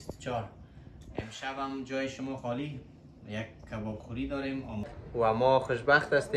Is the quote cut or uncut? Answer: cut